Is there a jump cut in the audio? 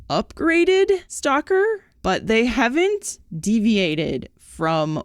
yes; 2 cuts; at 1.1 s, 1.9 s

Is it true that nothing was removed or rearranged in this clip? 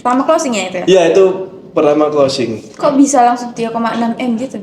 yes; 0 cuts

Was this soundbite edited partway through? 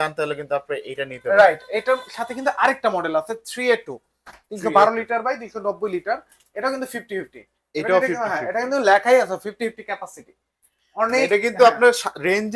no; 0 cuts

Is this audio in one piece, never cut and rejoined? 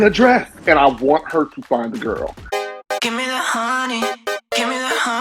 no; 1 cut; at 2.4 s

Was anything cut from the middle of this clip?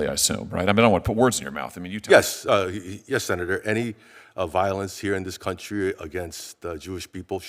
no; 0 cuts

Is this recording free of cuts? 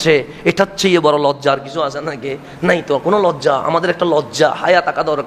yes; 0 cuts

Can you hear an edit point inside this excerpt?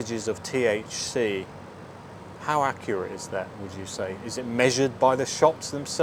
no; 0 cuts

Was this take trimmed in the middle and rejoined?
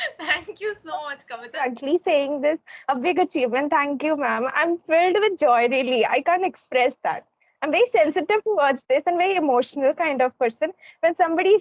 yes; 1 cut; at 1.6 s

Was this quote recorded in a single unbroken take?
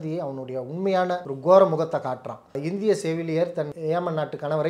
no; 3 cuts; at 1.3 s, 2.5 s, 3.7 s

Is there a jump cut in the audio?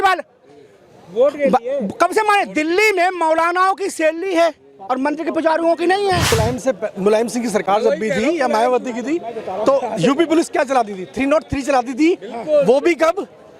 yes; 1 cut; at 6.3 s

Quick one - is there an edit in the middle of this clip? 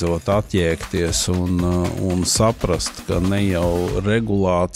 no; 0 cuts

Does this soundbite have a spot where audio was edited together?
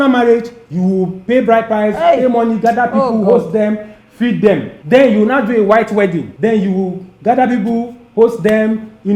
yes; 2 cuts; at 4.7 s, 6.3 s

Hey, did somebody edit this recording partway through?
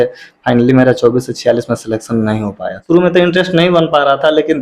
yes; 1 cut; at 2.7 s

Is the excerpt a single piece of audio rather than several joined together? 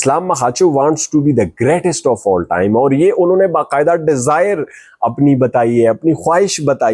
yes; 0 cuts

